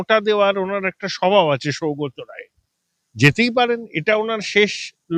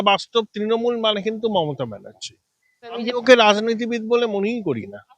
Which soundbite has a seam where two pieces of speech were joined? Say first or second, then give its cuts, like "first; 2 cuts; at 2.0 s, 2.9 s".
second; 1 cut; at 2.9 s